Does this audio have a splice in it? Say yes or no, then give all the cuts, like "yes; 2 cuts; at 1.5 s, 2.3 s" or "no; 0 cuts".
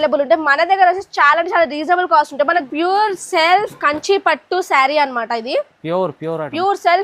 yes; 1 cut; at 2.7 s